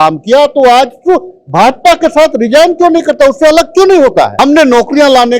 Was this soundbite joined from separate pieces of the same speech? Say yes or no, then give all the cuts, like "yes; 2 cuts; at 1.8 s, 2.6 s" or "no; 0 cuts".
yes; 1 cut; at 4.3 s